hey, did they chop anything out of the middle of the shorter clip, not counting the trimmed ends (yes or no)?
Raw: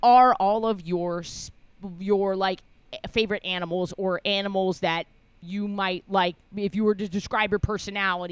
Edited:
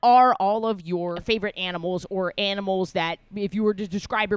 yes